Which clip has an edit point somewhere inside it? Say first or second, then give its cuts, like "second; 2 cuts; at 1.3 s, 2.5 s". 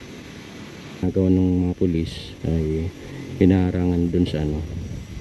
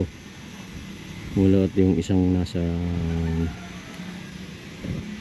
first; 1 cut; at 1.0 s